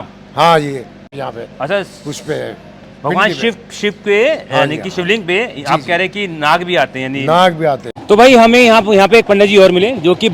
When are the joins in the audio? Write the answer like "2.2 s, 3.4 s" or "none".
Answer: 1.0 s, 7.9 s